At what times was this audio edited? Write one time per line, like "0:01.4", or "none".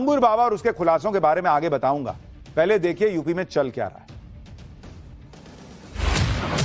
none

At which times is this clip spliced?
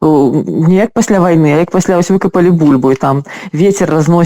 none

